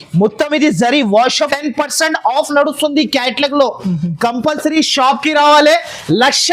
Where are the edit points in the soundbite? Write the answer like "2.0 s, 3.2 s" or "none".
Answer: 1.5 s